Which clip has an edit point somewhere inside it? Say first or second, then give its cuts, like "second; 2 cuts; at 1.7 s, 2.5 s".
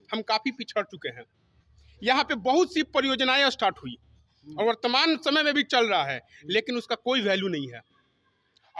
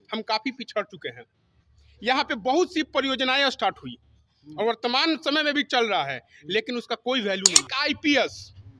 second; 1 cut; at 7.6 s